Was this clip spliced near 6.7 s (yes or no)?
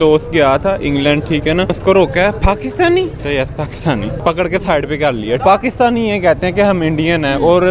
no